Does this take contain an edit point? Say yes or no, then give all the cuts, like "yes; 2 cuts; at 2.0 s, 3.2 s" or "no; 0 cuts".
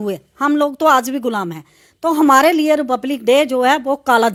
no; 0 cuts